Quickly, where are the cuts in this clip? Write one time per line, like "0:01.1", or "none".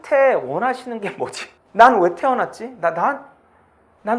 none